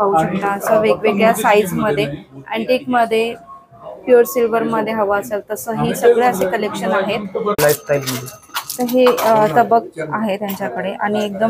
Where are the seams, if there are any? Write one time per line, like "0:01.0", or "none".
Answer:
0:07.5